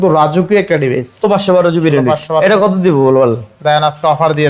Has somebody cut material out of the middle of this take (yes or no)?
yes